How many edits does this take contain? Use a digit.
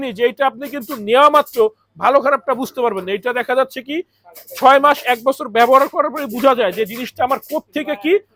0